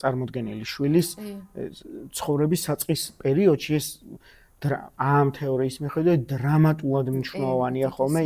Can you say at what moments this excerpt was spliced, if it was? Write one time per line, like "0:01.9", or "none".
none